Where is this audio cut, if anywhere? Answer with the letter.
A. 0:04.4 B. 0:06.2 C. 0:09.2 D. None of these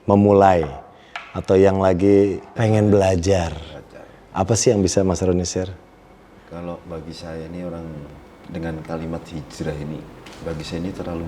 D